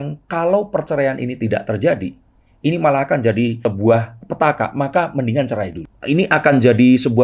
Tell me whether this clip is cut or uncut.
cut